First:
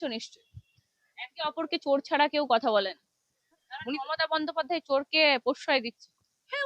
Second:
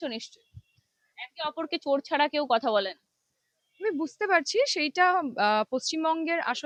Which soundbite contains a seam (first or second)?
first